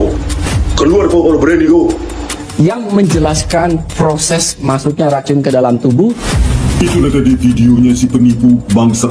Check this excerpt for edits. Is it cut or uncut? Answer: uncut